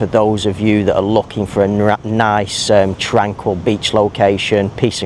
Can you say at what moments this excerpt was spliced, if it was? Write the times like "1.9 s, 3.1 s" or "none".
none